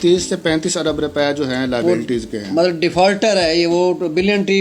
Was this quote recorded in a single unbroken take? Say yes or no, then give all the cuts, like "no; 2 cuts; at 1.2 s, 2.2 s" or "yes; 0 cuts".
yes; 0 cuts